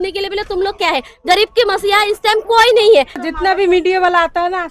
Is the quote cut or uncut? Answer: cut